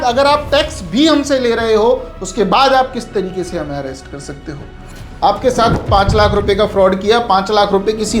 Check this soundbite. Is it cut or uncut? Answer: cut